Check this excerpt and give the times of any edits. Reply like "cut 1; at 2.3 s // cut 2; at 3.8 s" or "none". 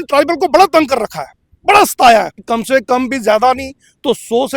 cut 1; at 2.4 s